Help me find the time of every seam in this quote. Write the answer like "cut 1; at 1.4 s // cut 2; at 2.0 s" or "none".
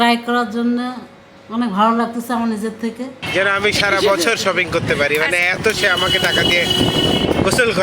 cut 1; at 3.2 s